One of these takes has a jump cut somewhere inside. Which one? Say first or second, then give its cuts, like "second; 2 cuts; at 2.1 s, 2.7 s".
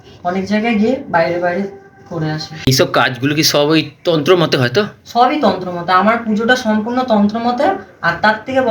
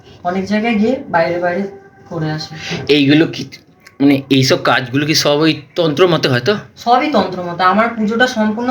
first; 1 cut; at 2.7 s